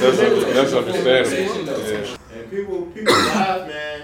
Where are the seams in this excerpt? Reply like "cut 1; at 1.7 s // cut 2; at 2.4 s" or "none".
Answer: cut 1; at 2.1 s

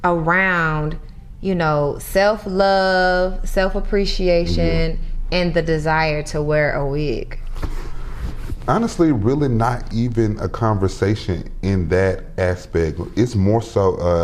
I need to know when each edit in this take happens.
none

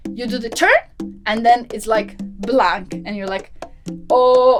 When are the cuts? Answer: none

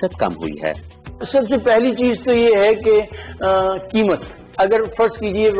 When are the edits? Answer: cut 1; at 1.2 s // cut 2; at 4.4 s

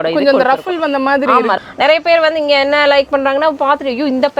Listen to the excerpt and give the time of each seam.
cut 1; at 1.6 s

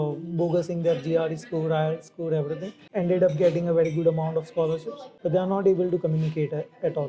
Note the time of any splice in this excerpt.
none

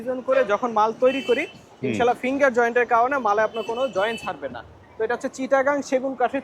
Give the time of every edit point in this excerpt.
none

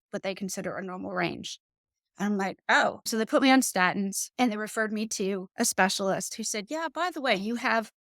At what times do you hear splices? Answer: cut 1; at 3.1 s // cut 2; at 4.2 s // cut 3; at 5.5 s

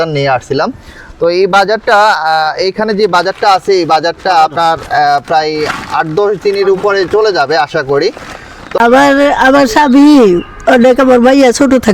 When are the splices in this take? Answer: cut 1; at 8.8 s

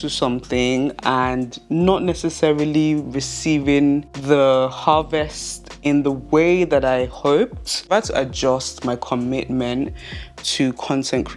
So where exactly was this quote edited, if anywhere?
cut 1; at 4.1 s // cut 2; at 7.9 s

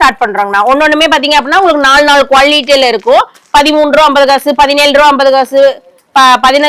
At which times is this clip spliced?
none

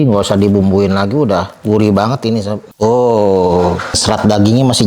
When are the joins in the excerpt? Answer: cut 1; at 1.5 s // cut 2; at 2.7 s // cut 3; at 4.0 s

